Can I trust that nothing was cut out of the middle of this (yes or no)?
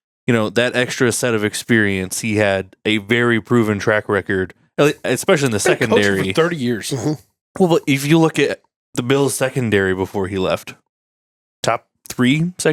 yes